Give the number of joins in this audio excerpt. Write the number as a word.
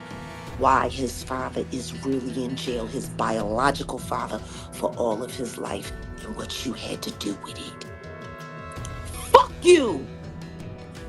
two